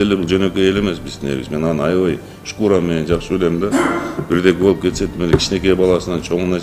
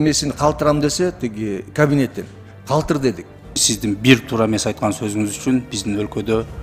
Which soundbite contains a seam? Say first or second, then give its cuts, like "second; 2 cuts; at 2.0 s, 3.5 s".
second; 1 cut; at 3.6 s